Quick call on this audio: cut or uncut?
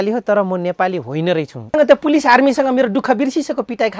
cut